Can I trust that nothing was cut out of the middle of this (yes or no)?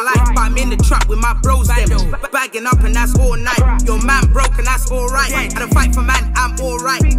yes